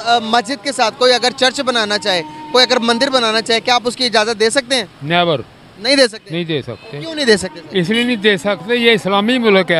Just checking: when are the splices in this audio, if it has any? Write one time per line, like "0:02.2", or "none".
none